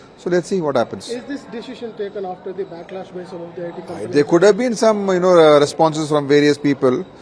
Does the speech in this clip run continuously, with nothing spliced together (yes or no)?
yes